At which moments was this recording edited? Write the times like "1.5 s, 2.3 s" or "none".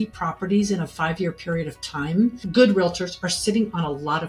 2.5 s